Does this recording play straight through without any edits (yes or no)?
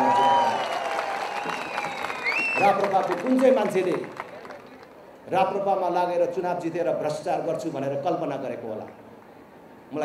yes